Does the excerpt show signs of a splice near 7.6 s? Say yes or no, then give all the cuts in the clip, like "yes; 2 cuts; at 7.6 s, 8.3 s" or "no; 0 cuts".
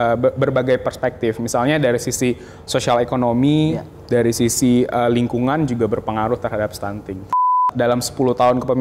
yes; 1 cut; at 7.6 s